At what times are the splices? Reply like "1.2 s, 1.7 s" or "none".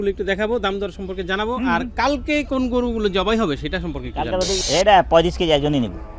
4.6 s